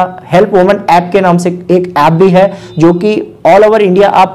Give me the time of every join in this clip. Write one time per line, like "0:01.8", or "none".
none